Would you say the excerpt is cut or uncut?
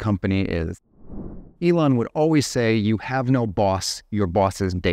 cut